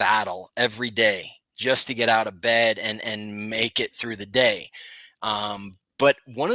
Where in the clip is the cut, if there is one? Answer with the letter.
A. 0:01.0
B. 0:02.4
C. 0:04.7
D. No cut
D